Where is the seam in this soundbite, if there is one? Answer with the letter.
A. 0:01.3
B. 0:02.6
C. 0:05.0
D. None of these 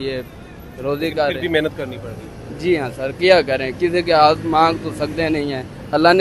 D